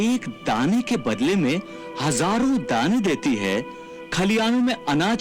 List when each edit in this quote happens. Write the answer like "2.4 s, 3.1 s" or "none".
none